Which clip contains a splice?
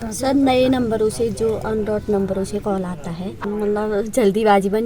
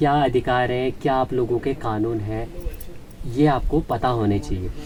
first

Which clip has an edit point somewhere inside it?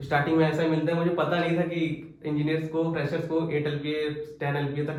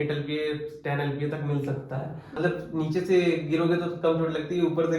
second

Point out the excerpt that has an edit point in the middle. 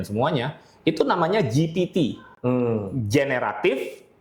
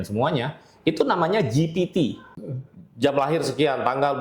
second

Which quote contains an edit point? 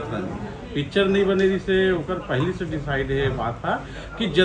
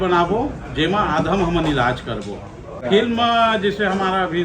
second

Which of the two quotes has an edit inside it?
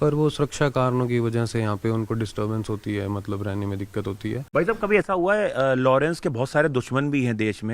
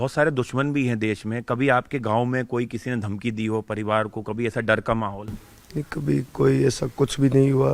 first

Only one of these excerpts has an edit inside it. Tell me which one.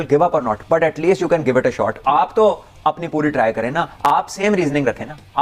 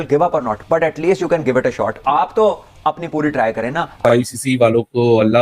second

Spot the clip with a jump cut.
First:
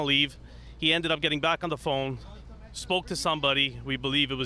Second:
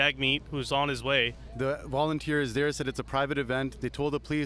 second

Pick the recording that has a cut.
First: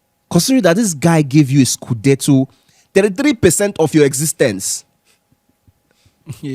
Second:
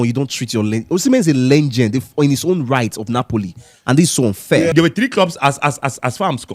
second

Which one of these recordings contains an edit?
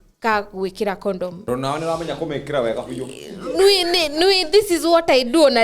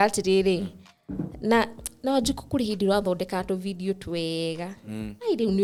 first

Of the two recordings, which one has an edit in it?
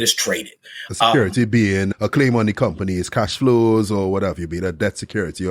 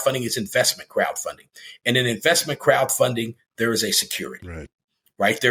first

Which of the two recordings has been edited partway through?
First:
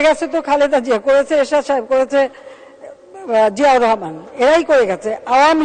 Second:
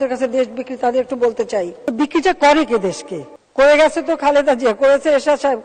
second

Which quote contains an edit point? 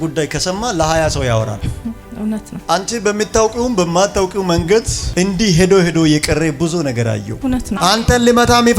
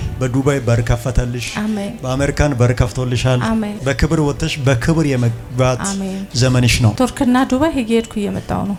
first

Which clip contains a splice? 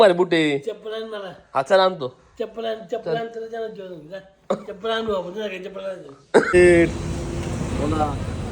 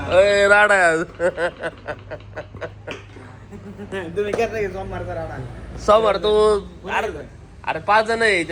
first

